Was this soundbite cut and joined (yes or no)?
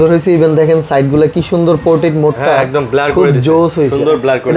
no